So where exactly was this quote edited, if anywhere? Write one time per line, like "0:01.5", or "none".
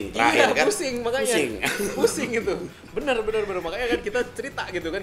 none